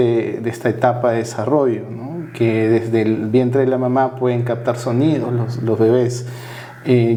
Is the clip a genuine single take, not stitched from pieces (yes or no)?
yes